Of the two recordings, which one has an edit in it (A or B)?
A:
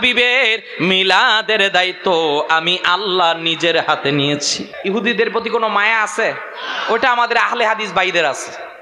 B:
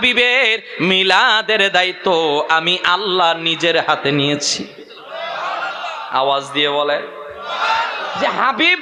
A